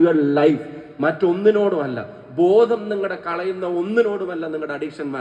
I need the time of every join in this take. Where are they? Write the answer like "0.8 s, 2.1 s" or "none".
none